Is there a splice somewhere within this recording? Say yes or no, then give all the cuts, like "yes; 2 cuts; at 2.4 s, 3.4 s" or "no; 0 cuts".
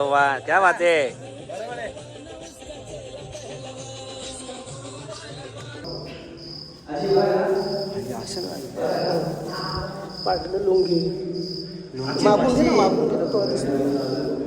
yes; 1 cut; at 5.8 s